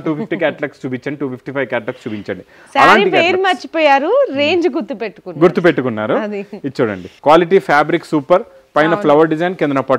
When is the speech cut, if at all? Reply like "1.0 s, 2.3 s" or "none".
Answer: none